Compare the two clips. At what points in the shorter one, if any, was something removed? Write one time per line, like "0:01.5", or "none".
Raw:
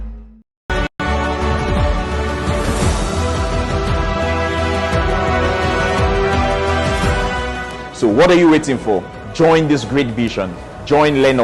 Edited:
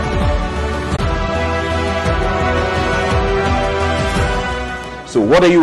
0:01.0